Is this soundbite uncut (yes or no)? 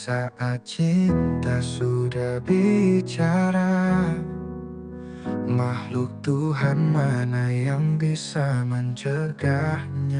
yes